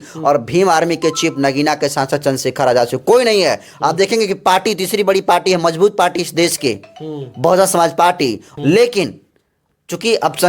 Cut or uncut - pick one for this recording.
cut